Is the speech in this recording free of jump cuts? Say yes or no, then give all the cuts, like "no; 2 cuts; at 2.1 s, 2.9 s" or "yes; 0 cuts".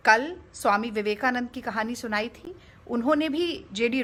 yes; 0 cuts